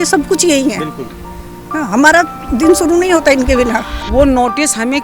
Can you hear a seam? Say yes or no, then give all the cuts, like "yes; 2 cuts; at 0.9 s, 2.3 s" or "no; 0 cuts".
yes; 1 cut; at 3.9 s